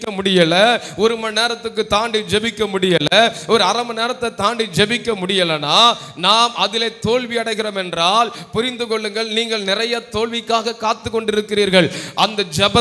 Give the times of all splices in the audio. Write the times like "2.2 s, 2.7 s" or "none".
none